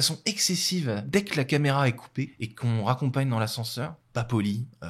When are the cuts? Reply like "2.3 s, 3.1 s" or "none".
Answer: 1.1 s, 2.4 s, 4.0 s